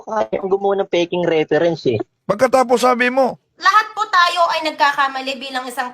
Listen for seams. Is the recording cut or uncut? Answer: cut